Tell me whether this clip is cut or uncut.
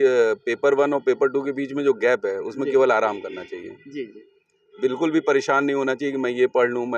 uncut